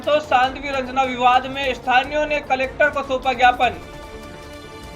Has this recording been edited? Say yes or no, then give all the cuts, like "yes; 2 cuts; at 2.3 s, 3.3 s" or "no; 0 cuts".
yes; 1 cut; at 3.8 s